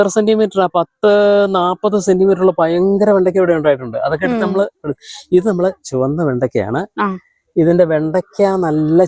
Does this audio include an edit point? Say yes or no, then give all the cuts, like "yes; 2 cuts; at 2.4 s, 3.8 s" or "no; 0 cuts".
no; 0 cuts